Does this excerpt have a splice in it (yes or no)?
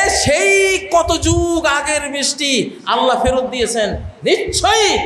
no